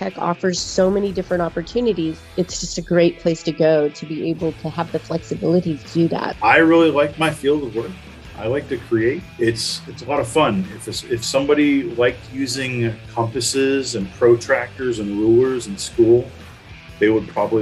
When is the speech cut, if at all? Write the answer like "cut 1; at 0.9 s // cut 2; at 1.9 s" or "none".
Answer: cut 1; at 2.2 s // cut 2; at 6.3 s // cut 3; at 9.3 s